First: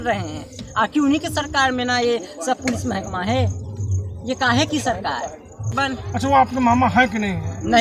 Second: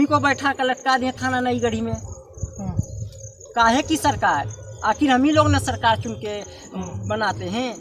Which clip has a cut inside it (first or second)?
first